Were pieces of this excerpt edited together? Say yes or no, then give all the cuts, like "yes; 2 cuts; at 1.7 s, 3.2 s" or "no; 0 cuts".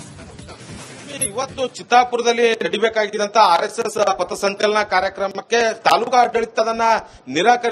no; 0 cuts